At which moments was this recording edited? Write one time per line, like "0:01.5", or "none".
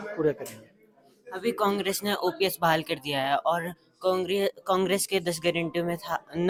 none

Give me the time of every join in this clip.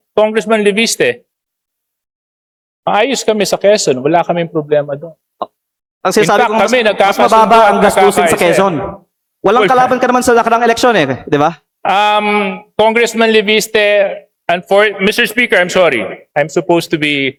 none

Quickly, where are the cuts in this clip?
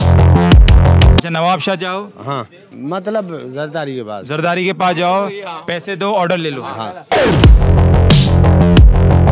0:01.3
0:07.0

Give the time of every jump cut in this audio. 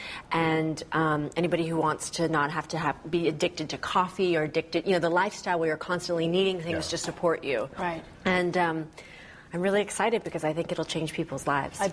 0:03.8

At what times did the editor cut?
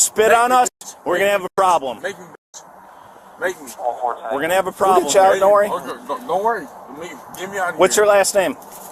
0:05.1

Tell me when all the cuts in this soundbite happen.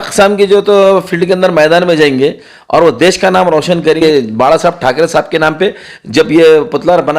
0:04.0

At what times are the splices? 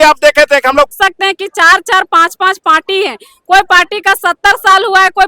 0:00.9

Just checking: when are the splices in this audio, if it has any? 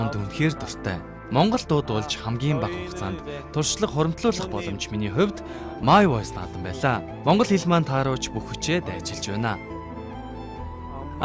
0:01.2

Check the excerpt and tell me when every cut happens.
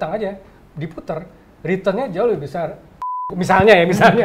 0:03.3

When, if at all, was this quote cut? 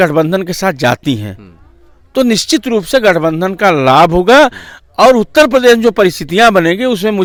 none

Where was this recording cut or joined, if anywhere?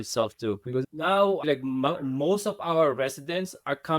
0:01.4

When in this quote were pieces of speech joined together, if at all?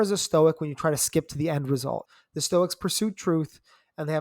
0:02.1

